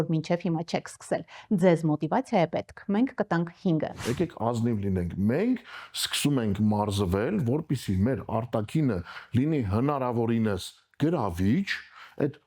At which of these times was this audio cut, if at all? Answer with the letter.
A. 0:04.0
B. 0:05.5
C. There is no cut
A